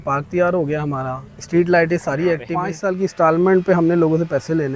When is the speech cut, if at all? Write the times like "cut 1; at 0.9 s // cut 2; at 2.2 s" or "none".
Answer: cut 1; at 2.8 s